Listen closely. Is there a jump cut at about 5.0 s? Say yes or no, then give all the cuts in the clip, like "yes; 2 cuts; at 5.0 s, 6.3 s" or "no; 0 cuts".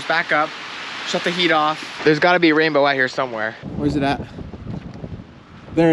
no; 2 cuts; at 1.9 s, 3.6 s